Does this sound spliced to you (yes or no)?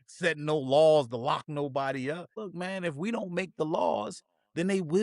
yes